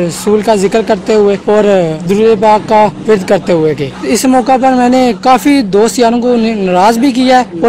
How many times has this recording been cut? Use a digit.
3